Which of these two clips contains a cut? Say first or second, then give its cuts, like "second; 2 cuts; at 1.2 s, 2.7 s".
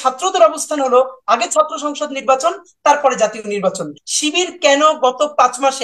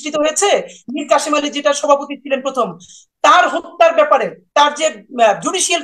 first; 1 cut; at 4.0 s